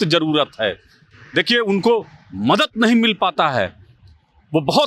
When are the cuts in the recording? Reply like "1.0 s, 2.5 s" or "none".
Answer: none